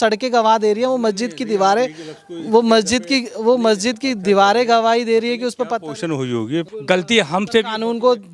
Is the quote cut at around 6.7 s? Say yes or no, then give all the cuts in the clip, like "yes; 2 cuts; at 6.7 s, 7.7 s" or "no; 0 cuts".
yes; 1 cut; at 6.7 s